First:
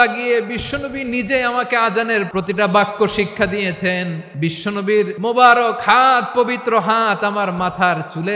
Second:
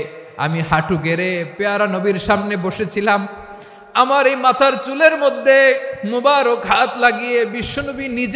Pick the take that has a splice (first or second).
first